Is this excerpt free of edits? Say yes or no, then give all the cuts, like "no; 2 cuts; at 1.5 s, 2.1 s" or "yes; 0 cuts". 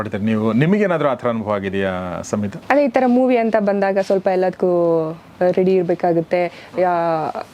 no; 1 cut; at 2.6 s